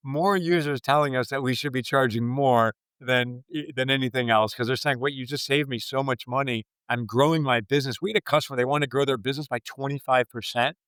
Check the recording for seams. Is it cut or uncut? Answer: uncut